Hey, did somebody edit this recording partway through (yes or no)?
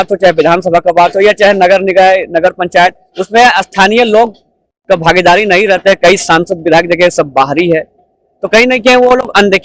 no